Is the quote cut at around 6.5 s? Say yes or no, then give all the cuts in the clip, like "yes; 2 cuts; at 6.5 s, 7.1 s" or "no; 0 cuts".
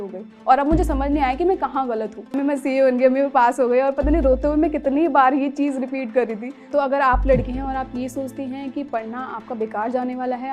yes; 2 cuts; at 2.4 s, 6.5 s